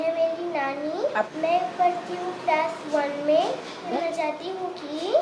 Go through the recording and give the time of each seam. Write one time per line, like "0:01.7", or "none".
0:01.3
0:03.9